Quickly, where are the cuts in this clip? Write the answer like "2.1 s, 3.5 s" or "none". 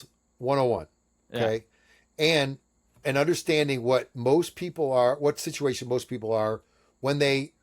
3.0 s

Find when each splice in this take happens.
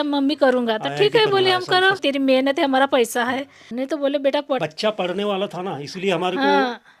2.0 s, 3.6 s, 4.6 s

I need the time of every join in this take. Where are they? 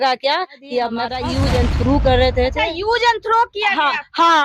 1.2 s

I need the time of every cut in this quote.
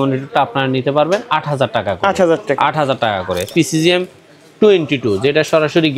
3.5 s

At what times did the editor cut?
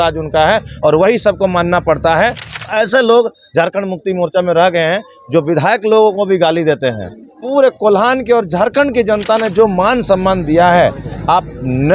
2.7 s, 7.3 s

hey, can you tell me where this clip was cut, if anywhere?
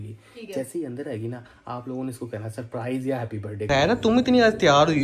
3.5 s

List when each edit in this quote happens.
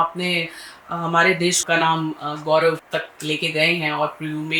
1.6 s, 2.8 s

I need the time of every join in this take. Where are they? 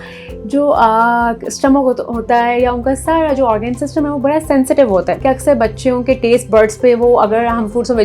5.1 s

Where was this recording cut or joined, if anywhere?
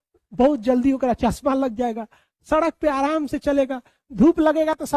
none

